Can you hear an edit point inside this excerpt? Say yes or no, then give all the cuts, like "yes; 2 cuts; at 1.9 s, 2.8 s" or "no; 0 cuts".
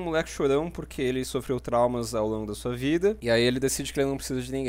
yes; 1 cut; at 3.2 s